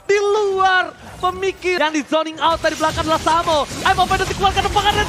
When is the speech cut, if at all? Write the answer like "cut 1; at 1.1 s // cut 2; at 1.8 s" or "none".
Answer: cut 1; at 1.8 s